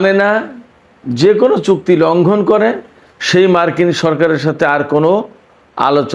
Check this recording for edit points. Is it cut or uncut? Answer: uncut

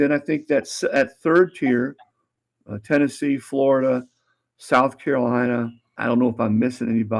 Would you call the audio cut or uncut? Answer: cut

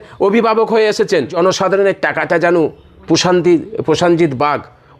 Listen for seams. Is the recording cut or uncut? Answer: cut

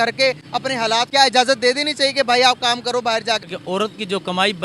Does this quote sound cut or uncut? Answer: cut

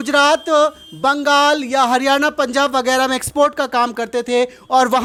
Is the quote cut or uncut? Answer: uncut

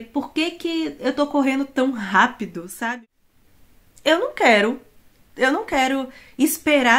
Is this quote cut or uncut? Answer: cut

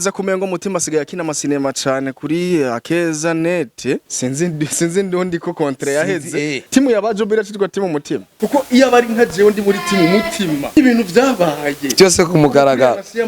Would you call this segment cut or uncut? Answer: cut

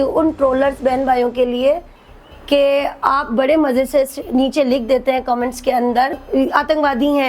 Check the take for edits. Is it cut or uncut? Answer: cut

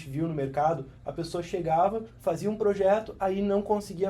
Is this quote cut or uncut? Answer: uncut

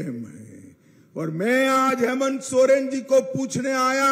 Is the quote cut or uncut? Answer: uncut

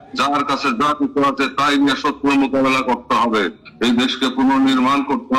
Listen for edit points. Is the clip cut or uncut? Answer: cut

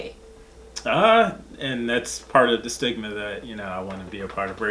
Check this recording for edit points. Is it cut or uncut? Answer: uncut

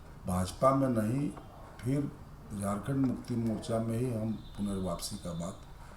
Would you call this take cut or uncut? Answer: uncut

